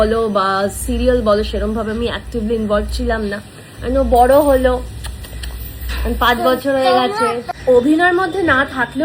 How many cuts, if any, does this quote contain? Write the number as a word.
one